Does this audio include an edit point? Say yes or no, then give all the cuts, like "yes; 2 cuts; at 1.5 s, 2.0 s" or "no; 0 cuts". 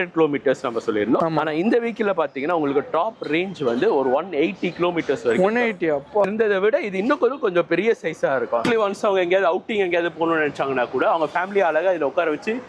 yes; 3 cuts; at 1.2 s, 6.6 s, 8.6 s